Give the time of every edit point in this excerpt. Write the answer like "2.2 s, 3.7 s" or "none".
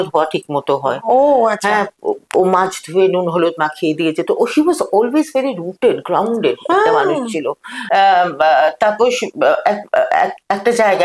7.8 s